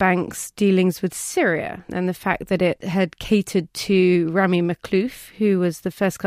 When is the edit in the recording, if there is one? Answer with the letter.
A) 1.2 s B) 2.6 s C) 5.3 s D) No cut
D